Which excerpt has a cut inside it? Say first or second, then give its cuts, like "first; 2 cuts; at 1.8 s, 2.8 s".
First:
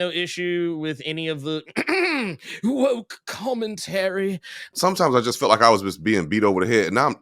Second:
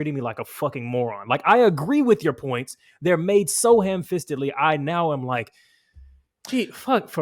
first; 1 cut; at 4.7 s